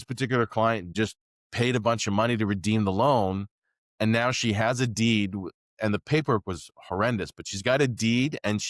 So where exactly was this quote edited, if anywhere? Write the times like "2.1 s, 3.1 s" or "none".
0.9 s